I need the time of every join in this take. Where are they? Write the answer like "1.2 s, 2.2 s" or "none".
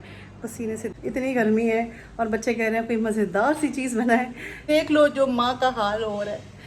0.9 s, 4.5 s